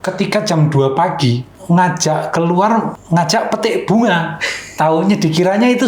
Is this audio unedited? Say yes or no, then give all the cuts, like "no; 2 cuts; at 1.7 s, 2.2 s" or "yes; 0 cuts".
no; 2 cuts; at 1.5 s, 3.0 s